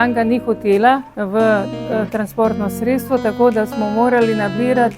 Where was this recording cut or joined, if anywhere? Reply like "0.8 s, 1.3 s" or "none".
1.1 s